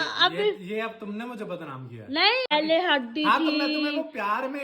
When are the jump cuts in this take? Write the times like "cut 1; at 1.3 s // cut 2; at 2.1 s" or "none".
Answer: cut 1; at 2.5 s